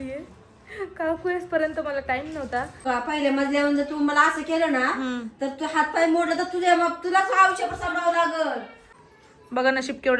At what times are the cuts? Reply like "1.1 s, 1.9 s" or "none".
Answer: 2.8 s, 9.0 s